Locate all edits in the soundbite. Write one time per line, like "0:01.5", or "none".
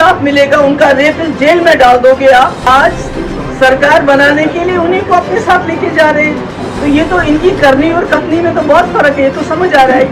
0:02.7

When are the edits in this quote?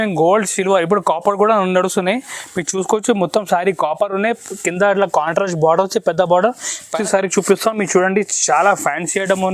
0:07.0

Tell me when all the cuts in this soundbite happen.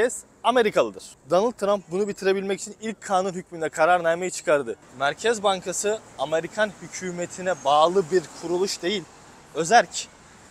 0:01.2
0:04.8

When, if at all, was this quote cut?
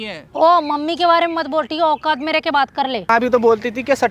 0:03.0

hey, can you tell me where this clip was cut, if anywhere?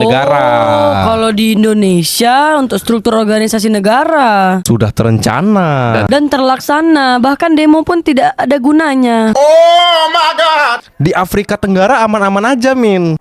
0:10.8

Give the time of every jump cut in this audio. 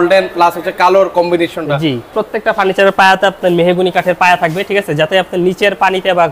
0:02.2

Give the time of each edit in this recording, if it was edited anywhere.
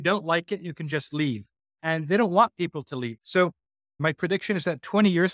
0:03.1
0:04.0

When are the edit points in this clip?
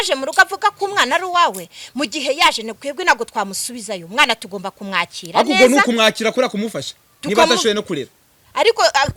none

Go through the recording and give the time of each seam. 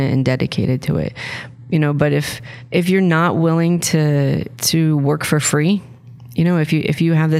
none

